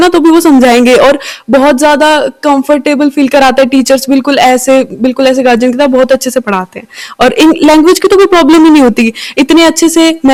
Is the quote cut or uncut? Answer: uncut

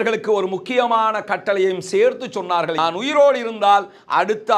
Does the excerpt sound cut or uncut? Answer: cut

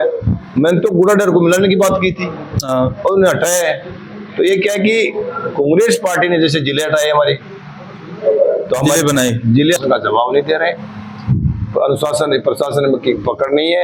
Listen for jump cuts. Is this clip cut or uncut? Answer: cut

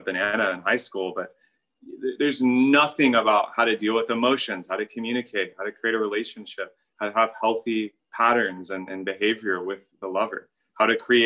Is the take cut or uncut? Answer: cut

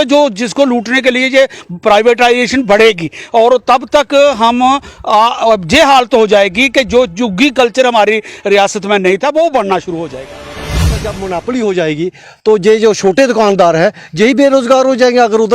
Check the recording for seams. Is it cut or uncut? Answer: cut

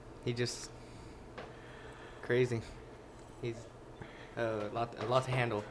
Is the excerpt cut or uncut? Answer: uncut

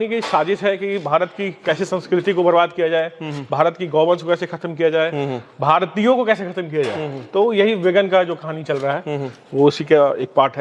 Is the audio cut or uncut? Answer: uncut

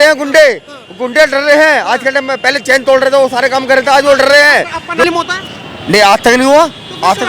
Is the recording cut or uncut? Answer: cut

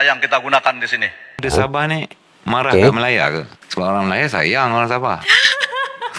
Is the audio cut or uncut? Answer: cut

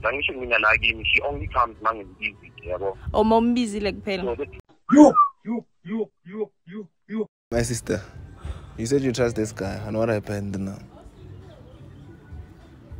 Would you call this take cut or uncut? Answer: cut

